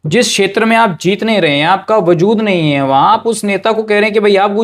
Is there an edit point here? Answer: no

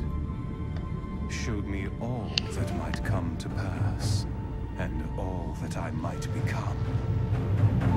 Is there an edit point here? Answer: yes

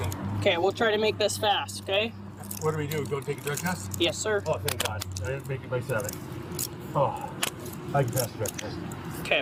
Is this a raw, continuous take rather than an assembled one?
yes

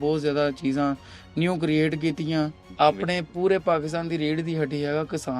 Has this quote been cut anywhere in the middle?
yes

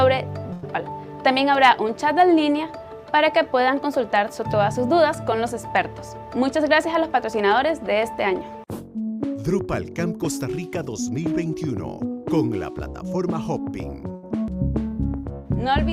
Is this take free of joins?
no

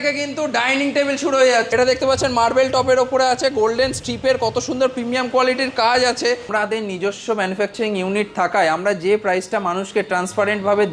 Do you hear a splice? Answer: yes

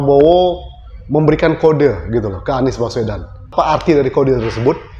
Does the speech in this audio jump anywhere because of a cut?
yes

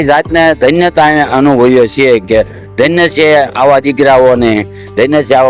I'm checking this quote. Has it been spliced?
no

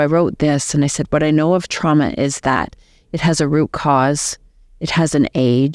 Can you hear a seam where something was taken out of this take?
no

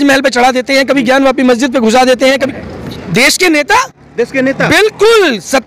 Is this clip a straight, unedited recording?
no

